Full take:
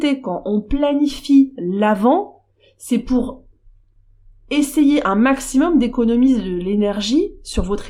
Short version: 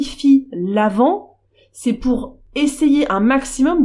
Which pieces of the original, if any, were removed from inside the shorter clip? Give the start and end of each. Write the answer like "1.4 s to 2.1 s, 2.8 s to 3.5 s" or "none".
3.4 s to 4.3 s